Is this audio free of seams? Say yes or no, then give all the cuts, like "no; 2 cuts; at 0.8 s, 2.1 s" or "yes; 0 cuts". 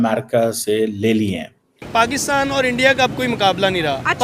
no; 1 cut; at 1.8 s